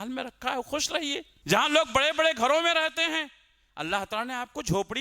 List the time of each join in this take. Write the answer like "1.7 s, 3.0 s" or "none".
1.3 s